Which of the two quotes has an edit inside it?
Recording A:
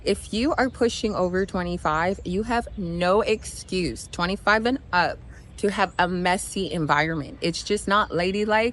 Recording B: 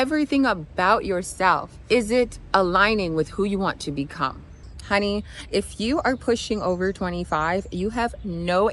B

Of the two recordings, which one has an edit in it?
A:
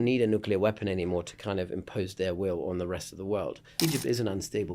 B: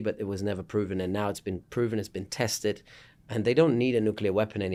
A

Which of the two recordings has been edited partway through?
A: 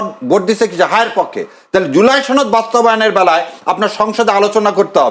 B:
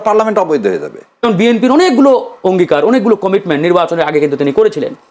B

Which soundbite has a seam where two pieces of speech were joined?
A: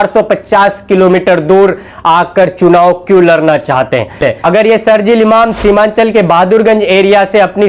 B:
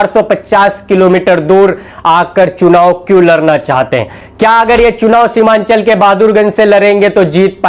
A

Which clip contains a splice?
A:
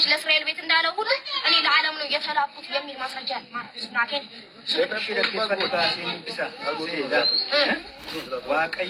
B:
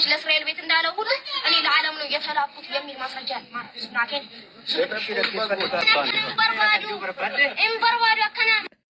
B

